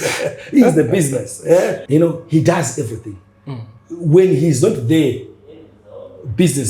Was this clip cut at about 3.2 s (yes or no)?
no